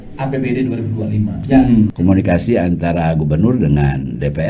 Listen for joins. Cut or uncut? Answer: cut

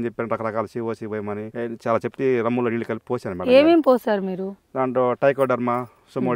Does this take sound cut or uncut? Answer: uncut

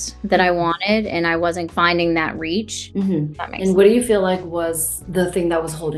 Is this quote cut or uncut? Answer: cut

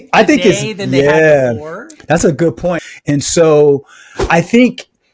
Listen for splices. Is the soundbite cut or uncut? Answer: cut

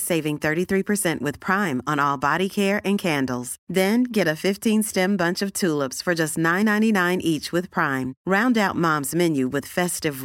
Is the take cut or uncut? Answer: uncut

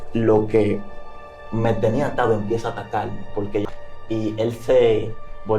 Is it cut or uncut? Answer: cut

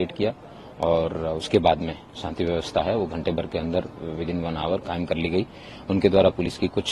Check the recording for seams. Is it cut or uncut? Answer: uncut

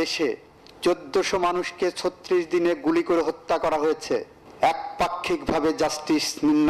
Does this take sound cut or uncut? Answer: cut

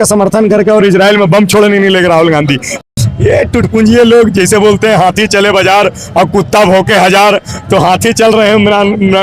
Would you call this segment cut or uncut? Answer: cut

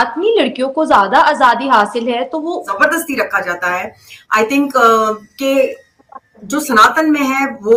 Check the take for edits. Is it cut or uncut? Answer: cut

